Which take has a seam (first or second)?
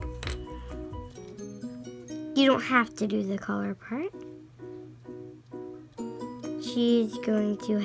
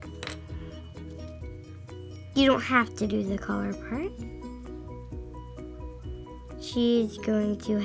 second